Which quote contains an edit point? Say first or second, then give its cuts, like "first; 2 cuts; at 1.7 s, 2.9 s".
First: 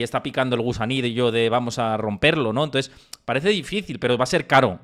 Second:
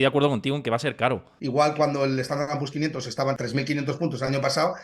second; 2 cuts; at 1.3 s, 3.4 s